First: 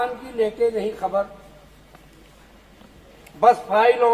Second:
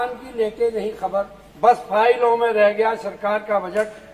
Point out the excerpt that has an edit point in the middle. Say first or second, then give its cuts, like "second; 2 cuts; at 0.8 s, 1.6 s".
second; 1 cut; at 1.4 s